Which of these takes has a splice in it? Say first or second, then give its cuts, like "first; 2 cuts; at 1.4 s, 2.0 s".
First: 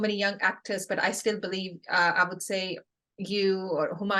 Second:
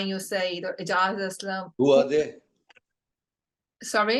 second; 1 cut; at 1.7 s